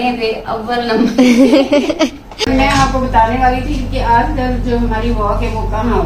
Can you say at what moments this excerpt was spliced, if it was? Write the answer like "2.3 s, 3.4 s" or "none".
2.5 s